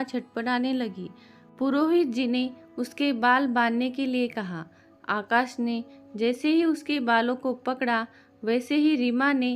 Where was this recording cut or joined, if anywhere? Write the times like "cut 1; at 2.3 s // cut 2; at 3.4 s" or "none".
none